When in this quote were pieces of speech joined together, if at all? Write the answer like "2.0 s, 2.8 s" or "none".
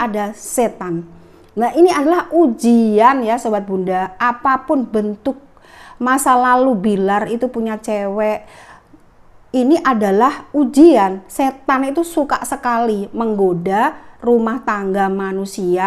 none